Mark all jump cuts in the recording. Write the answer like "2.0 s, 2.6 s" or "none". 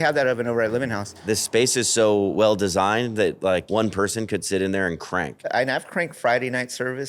1.2 s, 3.7 s, 5.5 s